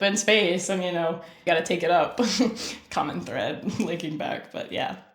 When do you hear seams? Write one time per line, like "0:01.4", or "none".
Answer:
0:01.4